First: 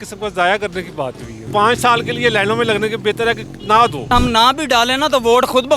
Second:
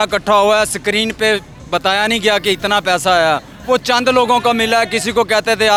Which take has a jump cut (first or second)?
first